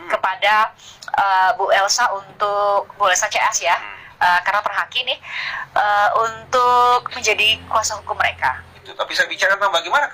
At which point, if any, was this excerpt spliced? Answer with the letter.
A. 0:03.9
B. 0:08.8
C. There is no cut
B